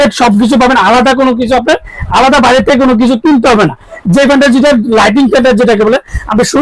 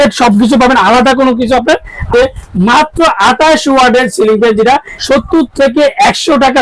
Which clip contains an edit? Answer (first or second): second